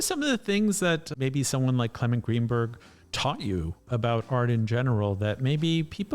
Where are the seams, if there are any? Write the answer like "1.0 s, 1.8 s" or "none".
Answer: 1.1 s